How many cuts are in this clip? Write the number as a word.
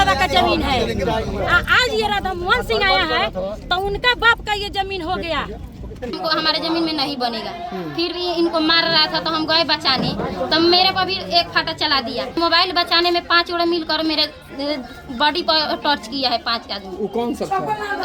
two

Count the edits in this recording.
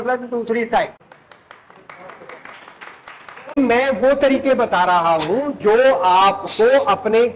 two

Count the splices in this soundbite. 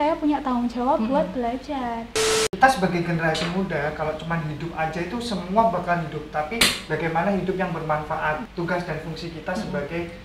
two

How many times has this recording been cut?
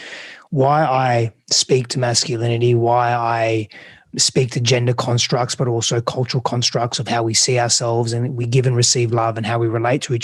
one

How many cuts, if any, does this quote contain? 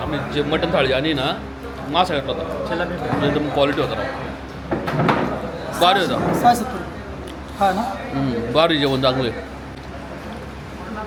zero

